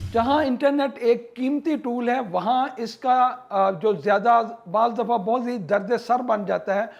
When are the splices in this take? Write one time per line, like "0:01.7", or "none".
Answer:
none